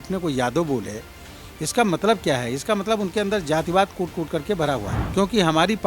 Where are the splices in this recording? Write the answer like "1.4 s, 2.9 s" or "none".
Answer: 5.0 s